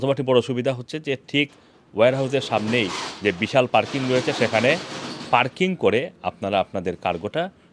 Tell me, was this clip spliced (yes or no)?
no